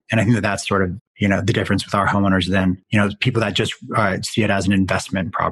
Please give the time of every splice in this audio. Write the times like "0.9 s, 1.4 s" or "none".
1.0 s, 2.8 s